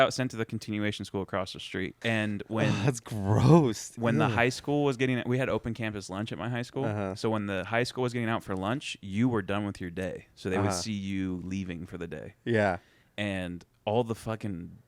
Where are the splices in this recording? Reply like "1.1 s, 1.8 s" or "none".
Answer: 1.9 s